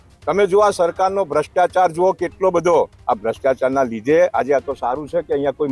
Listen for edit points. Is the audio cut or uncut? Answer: cut